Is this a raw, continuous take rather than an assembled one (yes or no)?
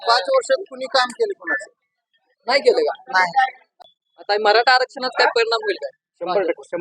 no